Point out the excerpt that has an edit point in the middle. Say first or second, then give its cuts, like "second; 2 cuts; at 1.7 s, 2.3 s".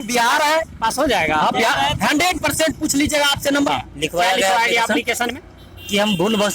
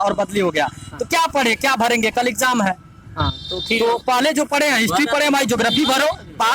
first; 1 cut; at 3.7 s